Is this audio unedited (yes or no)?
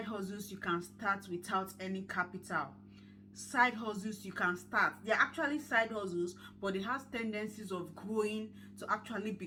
yes